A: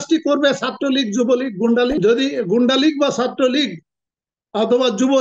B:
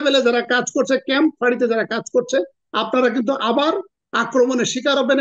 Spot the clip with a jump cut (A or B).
A